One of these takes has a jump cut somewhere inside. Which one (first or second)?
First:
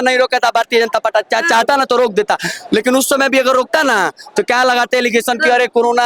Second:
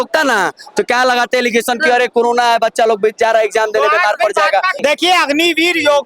second